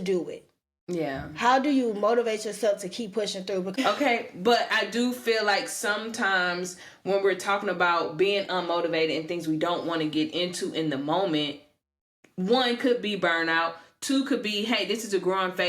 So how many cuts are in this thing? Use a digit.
1